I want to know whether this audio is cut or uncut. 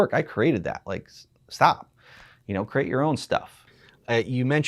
uncut